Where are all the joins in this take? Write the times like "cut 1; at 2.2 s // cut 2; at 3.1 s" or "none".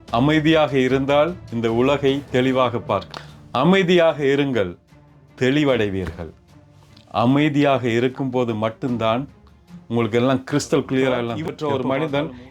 cut 1; at 11.3 s

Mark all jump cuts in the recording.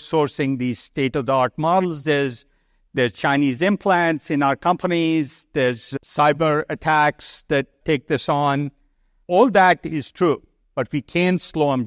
cut 1; at 5.8 s

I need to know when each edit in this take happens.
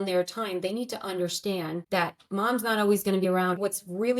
cut 1; at 1.8 s // cut 2; at 3.4 s

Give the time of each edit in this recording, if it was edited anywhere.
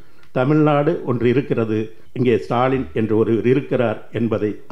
cut 1; at 2.0 s

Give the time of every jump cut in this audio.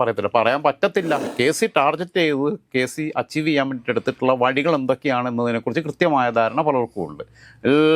cut 1; at 1.3 s

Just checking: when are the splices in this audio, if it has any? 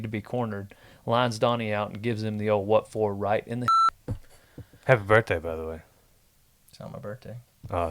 cut 1; at 3.7 s

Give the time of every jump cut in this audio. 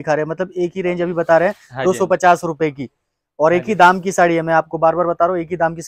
none

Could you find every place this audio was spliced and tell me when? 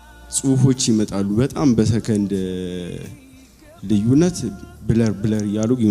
none

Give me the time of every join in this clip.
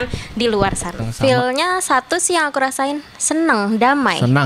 cut 1; at 1.0 s

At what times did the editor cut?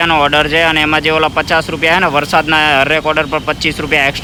none

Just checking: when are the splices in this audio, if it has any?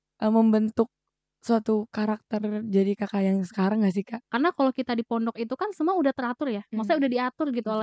cut 1; at 4.2 s

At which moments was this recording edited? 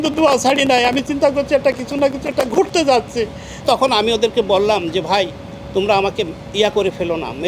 cut 1; at 3.6 s

